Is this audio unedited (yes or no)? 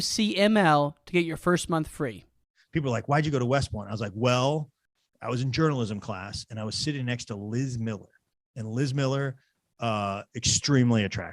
no